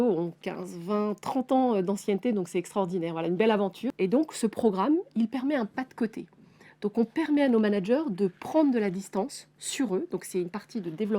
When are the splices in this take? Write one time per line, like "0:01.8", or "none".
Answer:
0:03.8